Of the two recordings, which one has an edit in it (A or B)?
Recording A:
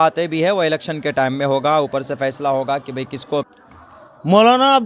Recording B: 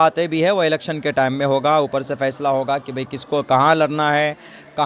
A